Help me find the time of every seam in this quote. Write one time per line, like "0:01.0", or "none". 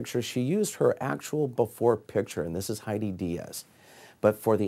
none